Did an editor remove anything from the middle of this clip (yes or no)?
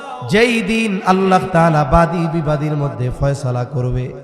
no